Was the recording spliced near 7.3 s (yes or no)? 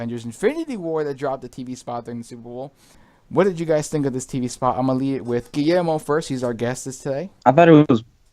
yes